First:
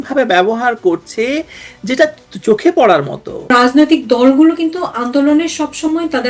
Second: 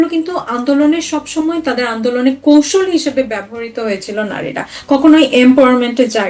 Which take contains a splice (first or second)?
first